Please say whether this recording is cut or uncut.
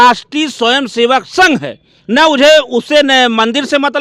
uncut